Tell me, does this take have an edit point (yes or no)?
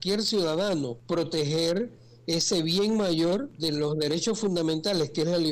yes